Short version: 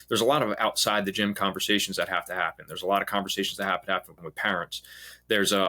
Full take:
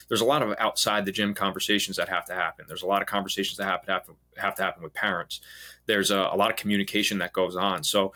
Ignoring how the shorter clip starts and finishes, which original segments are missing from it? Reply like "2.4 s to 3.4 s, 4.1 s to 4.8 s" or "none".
4.3 s to 4.9 s